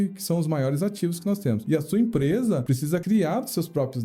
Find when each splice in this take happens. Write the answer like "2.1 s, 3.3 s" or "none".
1.6 s, 2.9 s